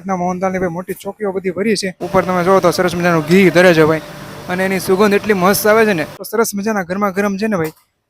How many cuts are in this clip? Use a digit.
2